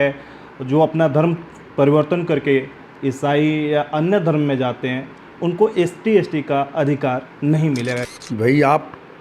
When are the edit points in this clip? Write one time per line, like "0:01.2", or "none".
0:08.1